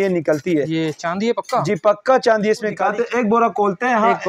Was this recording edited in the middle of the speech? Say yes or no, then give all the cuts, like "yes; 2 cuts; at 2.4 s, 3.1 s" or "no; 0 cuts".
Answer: yes; 1 cut; at 2.8 s